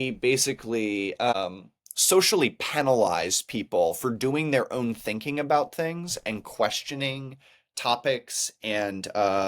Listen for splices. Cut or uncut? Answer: cut